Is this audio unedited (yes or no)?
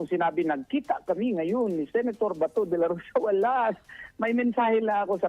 yes